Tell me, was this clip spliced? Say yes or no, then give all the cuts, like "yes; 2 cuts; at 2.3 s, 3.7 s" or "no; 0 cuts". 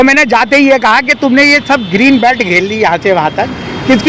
no; 0 cuts